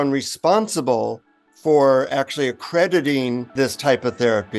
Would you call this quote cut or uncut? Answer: cut